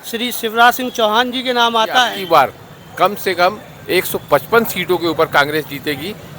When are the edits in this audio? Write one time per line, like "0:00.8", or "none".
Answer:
0:02.1